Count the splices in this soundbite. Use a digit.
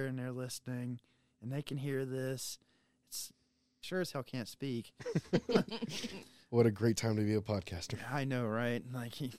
1